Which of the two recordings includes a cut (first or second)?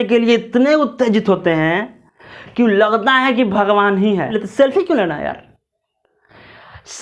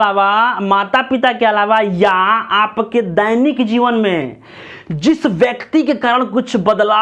first